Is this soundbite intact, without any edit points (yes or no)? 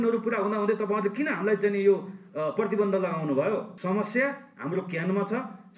no